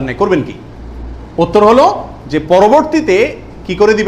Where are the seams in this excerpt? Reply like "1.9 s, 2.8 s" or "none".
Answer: none